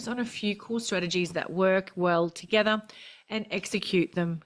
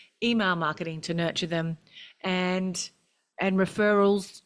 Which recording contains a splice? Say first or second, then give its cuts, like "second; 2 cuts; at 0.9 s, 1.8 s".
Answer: second; 1 cut; at 3.3 s